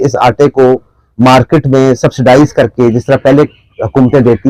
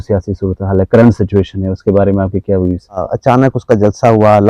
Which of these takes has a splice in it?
second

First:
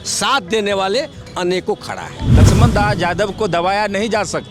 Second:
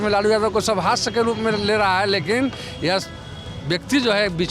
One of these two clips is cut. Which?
first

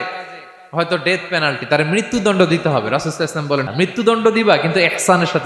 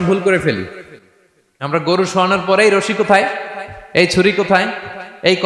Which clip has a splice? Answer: first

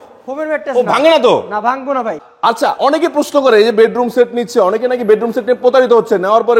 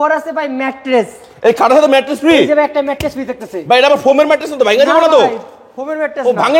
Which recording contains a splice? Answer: first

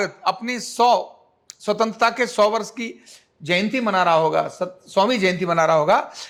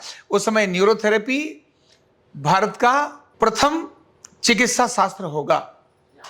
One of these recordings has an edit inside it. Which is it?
second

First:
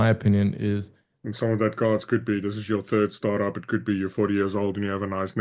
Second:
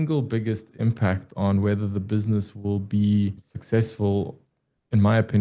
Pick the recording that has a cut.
first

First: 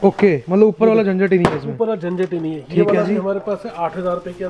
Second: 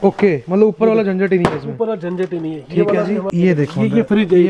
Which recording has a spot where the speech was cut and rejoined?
second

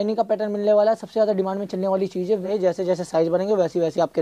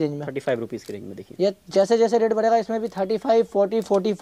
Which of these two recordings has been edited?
first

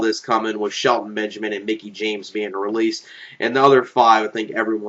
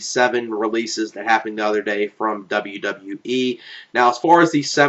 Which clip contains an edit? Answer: second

